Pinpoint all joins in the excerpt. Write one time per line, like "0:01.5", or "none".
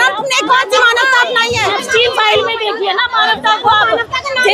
0:01.7